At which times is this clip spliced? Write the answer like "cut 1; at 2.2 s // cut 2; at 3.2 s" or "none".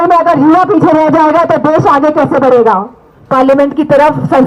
cut 1; at 3.1 s